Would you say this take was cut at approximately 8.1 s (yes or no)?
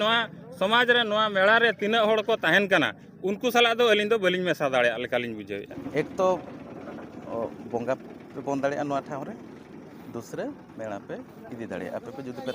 no